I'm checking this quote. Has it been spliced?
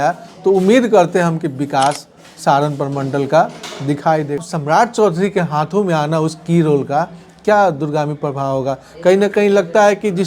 yes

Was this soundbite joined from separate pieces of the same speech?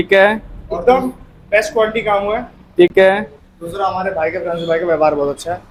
no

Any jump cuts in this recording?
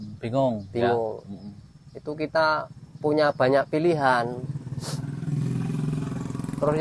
no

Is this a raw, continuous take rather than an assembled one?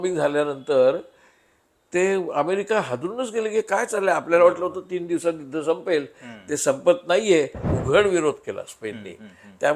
no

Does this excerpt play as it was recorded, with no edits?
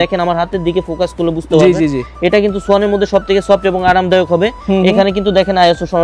yes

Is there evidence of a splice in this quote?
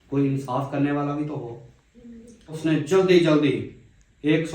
yes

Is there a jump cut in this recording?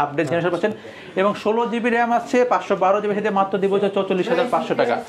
no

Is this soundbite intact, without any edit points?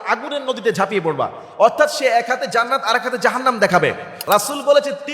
no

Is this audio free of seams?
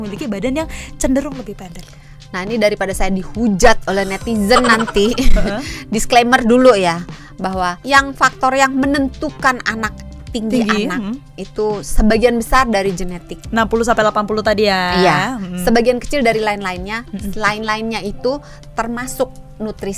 yes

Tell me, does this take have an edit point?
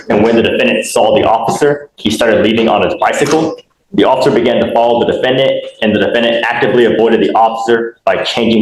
no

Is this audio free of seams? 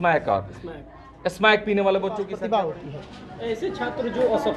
no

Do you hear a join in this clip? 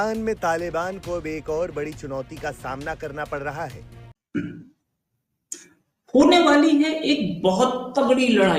yes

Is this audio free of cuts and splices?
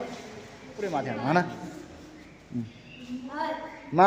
no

